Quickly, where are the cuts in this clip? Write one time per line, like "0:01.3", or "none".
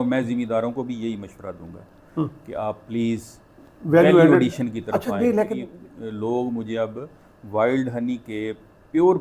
0:05.7